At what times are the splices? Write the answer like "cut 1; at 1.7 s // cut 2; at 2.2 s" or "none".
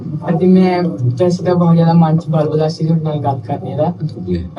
none